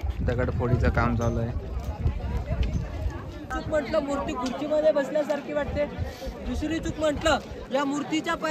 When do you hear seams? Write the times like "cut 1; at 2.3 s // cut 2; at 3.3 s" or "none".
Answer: cut 1; at 3.5 s